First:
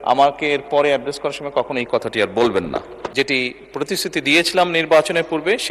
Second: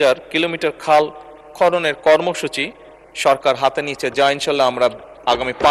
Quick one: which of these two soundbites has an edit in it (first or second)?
first